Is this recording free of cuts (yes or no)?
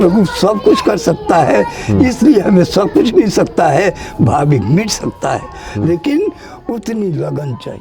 yes